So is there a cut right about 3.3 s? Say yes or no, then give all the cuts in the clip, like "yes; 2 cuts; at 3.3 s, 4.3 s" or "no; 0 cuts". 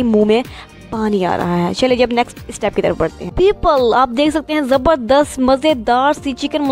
yes; 1 cut; at 3.3 s